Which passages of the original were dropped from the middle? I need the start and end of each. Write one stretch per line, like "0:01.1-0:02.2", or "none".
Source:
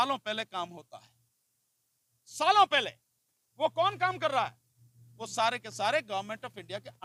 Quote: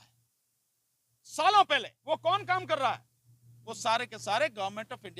0:02.9-0:03.4